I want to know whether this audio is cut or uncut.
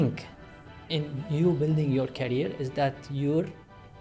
uncut